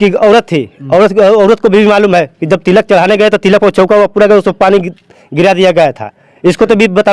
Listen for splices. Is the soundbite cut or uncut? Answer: uncut